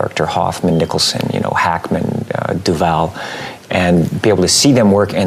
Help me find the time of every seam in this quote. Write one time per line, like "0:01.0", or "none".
none